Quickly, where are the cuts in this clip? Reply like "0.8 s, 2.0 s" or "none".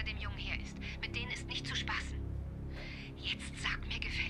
none